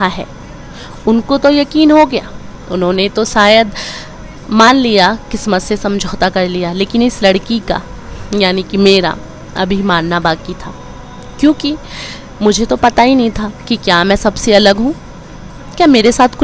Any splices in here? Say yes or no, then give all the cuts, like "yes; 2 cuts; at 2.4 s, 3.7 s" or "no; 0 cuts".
no; 0 cuts